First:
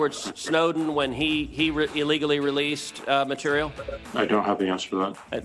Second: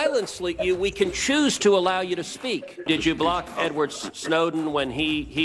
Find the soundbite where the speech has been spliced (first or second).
second